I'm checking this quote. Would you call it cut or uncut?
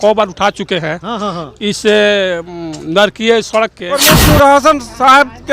cut